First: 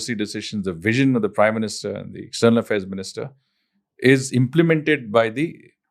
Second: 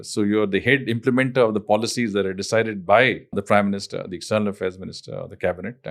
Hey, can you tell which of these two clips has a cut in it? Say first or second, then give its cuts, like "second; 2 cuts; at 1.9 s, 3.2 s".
second; 1 cut; at 3.4 s